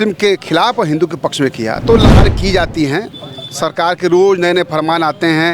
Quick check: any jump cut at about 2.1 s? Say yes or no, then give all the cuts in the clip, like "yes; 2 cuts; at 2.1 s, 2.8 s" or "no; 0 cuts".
yes; 1 cut; at 2.1 s